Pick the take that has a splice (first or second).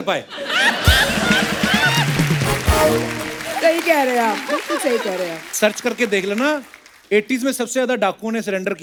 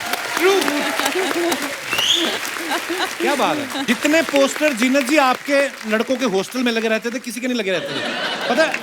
second